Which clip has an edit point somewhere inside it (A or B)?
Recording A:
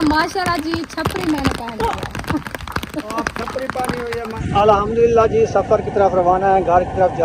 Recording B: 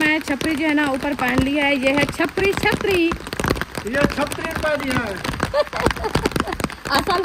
A